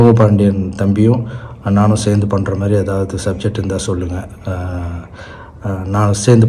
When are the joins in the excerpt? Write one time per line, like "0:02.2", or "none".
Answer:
none